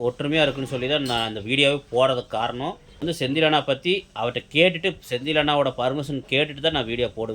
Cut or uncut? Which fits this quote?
cut